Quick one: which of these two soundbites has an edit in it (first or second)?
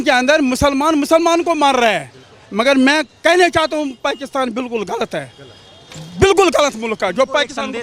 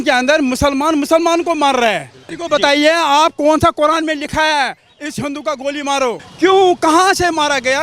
second